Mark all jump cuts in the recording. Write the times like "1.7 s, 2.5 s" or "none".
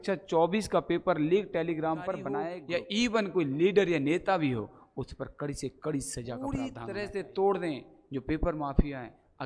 2.6 s, 6.5 s